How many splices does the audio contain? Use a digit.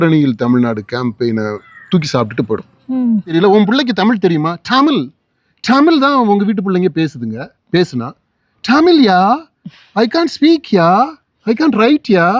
1